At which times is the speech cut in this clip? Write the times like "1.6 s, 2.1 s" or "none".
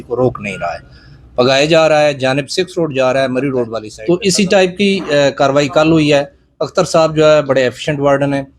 3.9 s

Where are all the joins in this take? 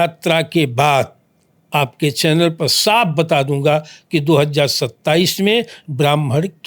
none

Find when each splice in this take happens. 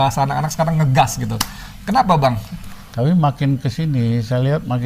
2.5 s

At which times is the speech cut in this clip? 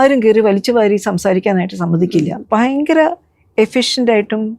2.4 s

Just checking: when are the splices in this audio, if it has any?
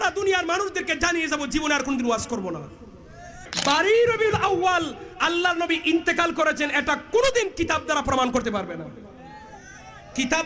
3.4 s

